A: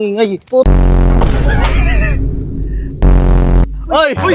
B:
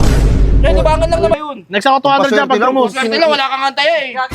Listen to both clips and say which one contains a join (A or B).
B